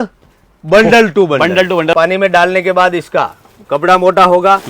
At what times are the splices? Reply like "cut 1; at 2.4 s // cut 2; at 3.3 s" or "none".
cut 1; at 1.9 s